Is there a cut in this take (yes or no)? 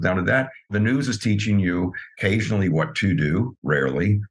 yes